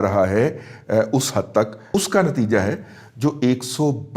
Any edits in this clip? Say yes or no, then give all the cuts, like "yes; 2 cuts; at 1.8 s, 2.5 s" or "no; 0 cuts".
yes; 1 cut; at 1.8 s